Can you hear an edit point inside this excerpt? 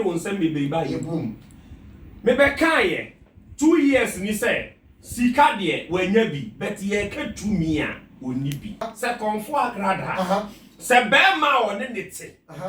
no; 0 cuts

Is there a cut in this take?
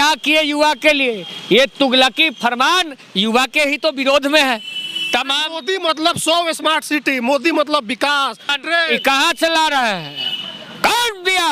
no; 0 cuts

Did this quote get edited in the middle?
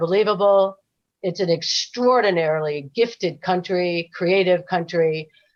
no; 0 cuts

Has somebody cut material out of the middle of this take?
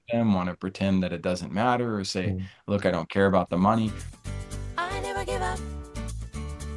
yes; 1 cut; at 4.1 s

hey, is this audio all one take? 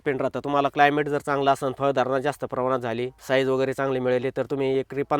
yes; 0 cuts

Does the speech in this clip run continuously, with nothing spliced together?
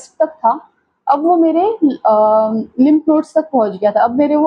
yes; 0 cuts

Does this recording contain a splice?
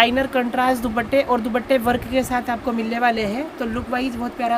no; 0 cuts

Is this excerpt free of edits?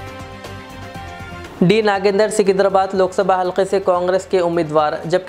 no; 1 cut; at 1.4 s

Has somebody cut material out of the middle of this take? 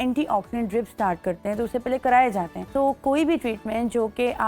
yes; 1 cut; at 2.6 s

